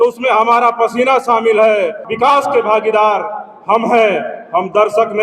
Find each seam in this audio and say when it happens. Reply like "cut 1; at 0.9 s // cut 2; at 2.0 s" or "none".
cut 1; at 2.0 s